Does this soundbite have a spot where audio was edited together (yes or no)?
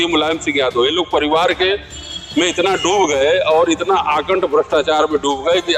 no